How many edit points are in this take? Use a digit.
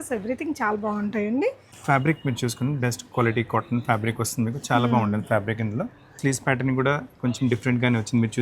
2